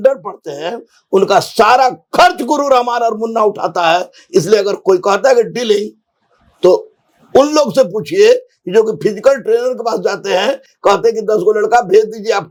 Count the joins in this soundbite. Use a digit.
0